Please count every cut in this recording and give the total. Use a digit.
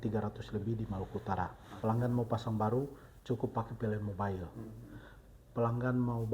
1